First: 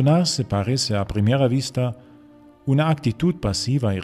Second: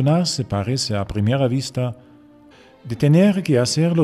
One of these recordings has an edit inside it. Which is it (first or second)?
first